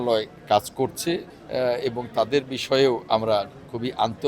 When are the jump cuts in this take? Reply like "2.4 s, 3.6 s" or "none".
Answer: 1.4 s